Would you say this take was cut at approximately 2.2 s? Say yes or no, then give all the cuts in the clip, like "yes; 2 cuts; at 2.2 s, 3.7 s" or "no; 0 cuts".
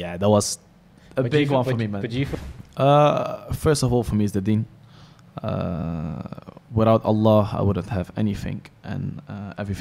yes; 1 cut; at 2.2 s